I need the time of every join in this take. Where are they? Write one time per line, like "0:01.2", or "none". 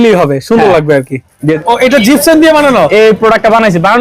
0:01.5